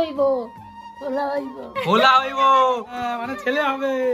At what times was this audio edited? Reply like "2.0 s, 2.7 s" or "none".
2.9 s